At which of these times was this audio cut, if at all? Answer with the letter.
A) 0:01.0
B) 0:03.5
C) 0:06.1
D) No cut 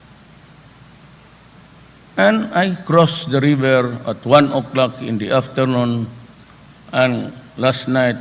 B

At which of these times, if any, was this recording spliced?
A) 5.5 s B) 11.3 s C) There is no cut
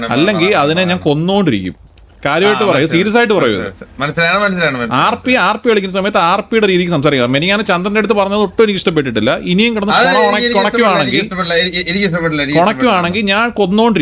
C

